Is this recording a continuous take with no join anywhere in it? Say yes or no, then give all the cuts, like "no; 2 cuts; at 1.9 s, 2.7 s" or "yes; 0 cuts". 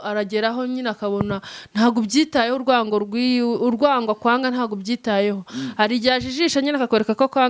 yes; 0 cuts